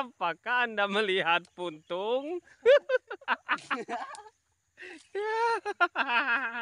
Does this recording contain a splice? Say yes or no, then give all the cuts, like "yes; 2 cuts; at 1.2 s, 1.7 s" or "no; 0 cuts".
no; 0 cuts